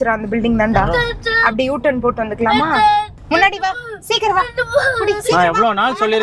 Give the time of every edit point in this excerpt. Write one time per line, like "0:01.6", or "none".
0:03.2